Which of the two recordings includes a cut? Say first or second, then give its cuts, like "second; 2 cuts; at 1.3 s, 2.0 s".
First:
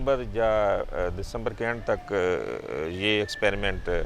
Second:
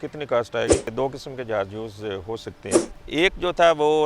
second; 2 cuts; at 0.9 s, 2.9 s